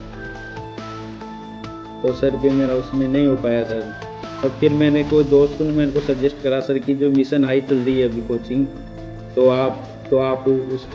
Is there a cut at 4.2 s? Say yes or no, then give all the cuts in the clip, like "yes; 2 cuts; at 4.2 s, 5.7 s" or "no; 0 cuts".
yes; 1 cut; at 4.2 s